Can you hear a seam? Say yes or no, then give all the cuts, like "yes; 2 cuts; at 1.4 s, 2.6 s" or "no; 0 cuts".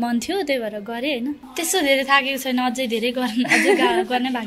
yes; 1 cut; at 1.5 s